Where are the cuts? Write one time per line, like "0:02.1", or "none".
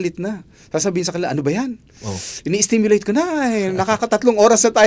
none

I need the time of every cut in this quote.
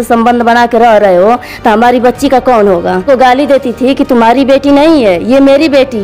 0:03.0

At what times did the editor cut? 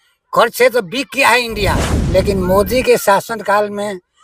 0:01.9

